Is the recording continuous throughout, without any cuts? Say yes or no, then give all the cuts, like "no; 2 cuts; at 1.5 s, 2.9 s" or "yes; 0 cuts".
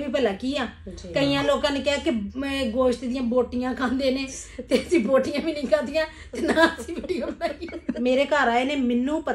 no; 1 cut; at 7.9 s